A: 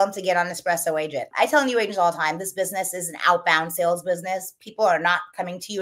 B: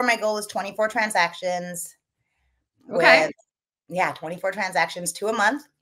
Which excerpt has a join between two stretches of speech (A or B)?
A